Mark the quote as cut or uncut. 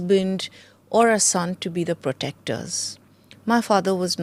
uncut